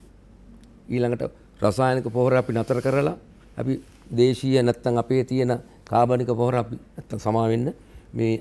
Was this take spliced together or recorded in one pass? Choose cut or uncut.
uncut